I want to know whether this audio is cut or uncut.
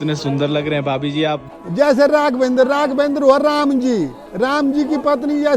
cut